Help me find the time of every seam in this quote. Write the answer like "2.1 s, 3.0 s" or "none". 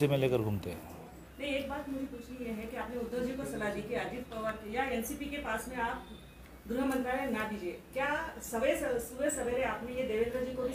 1.3 s